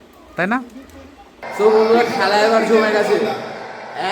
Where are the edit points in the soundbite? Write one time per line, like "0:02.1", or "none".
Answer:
0:01.5